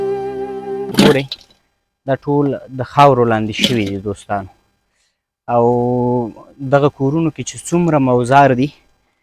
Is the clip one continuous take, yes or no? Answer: no